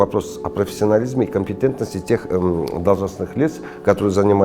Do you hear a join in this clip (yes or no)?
no